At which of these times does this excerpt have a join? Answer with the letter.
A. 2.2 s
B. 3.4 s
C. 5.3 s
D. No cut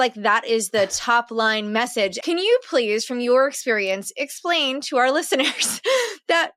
A